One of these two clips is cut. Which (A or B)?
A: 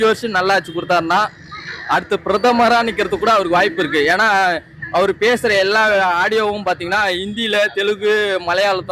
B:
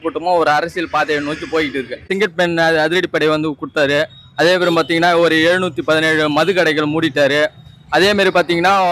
B